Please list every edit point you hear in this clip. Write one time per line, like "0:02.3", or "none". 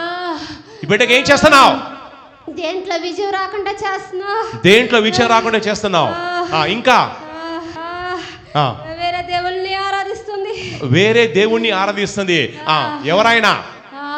0:07.7